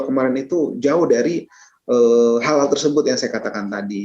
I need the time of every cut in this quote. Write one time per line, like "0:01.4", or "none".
none

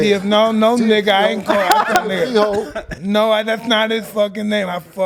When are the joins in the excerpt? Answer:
none

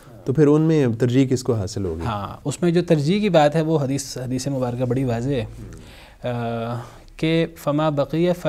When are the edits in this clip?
none

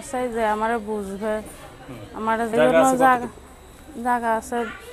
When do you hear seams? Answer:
0:02.5

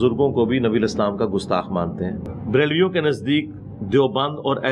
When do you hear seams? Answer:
0:02.3

